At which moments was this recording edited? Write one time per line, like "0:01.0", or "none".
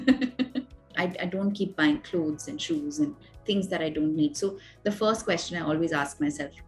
0:01.0